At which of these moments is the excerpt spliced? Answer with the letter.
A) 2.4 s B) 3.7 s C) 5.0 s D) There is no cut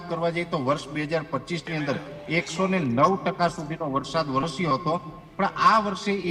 D